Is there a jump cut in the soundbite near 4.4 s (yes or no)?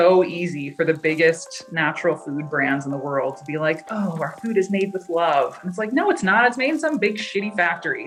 no